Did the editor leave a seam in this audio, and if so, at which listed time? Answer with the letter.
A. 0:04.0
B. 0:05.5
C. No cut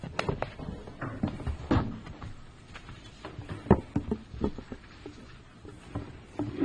A